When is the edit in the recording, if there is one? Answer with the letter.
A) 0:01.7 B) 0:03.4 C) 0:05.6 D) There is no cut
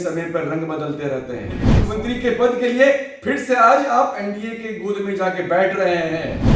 A